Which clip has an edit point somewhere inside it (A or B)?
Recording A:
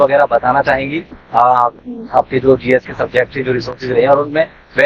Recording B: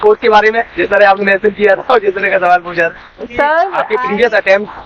B